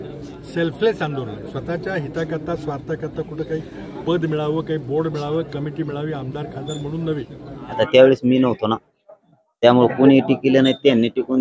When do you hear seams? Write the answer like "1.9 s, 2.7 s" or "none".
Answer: 7.8 s